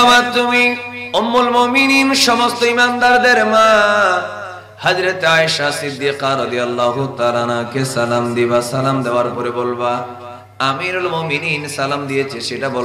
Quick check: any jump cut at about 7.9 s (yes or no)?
no